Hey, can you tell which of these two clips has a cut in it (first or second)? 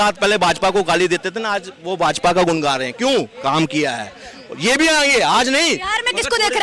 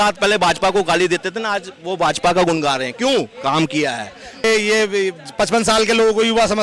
second